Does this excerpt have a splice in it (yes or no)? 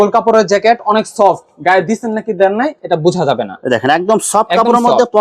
no